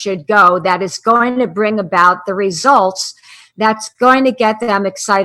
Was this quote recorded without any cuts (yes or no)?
yes